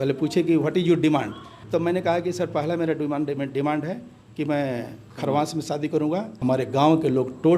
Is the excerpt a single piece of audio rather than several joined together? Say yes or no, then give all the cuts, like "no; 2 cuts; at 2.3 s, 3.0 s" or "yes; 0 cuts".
no; 2 cuts; at 1.5 s, 6.3 s